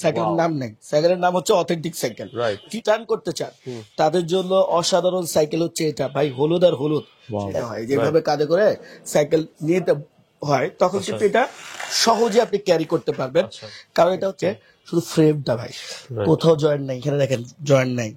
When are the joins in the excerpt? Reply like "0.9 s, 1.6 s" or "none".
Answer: 2.7 s, 7.6 s, 14.3 s

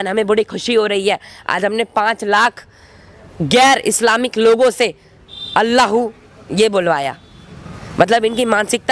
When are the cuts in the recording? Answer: none

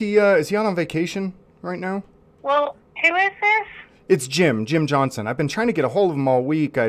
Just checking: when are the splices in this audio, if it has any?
none

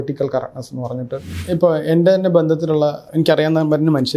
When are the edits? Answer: 1.3 s, 3.0 s

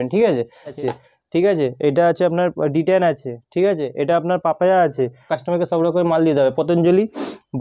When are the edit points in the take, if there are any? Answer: 0.7 s, 5.3 s

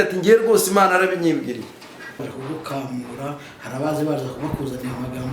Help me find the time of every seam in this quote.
2.3 s

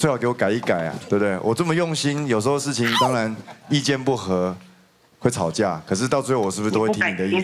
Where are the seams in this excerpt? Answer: none

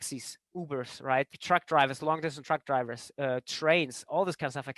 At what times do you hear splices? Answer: 1.4 s

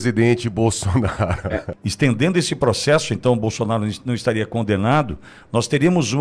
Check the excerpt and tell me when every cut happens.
1.6 s

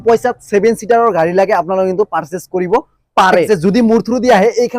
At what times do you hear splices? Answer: 3.5 s

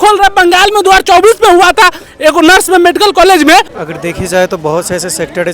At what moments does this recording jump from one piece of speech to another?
3.7 s

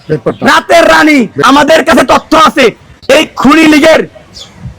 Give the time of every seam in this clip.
1.4 s

